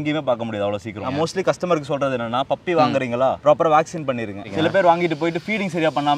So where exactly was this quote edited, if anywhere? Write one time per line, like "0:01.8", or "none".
0:01.0
0:04.5

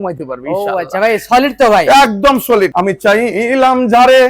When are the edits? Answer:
0:02.7

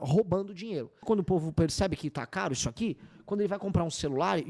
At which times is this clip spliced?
0:01.0

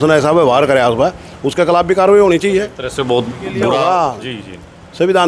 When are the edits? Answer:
0:02.8
0:03.8

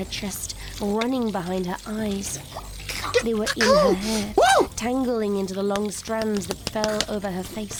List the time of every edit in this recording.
none

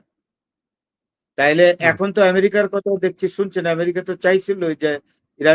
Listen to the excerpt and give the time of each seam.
none

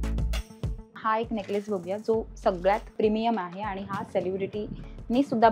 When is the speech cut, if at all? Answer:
0:00.9
0:02.9

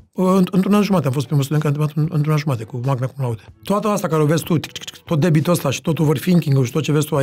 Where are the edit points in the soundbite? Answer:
0:03.5

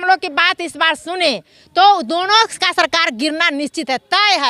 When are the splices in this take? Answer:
none

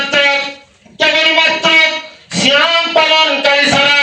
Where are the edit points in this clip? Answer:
none

